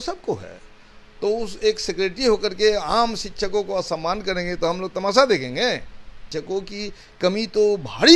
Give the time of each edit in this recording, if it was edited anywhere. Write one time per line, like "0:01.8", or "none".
0:06.2